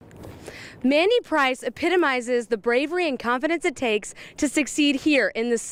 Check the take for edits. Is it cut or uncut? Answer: uncut